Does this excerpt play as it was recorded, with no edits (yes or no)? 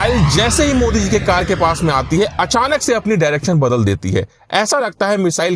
yes